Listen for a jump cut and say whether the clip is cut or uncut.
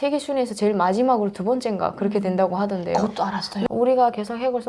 cut